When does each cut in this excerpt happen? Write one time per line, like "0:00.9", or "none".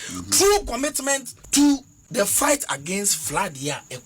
0:01.4
0:02.0